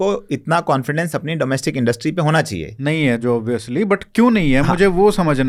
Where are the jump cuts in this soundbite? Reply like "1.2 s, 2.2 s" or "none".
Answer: none

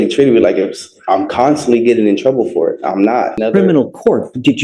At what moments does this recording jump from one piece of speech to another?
3.4 s

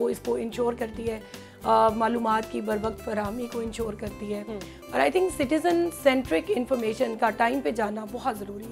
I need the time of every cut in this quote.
none

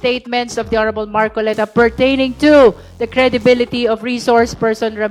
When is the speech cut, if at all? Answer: none

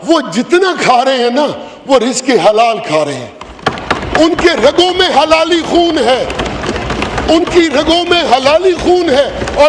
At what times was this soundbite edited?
none

